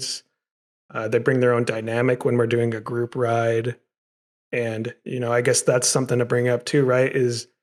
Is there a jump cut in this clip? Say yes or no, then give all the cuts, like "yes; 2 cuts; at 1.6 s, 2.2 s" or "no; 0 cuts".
no; 0 cuts